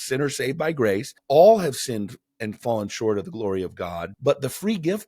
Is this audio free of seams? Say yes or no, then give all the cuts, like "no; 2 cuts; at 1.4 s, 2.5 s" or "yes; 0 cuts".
no; 2 cuts; at 1.1 s, 4.1 s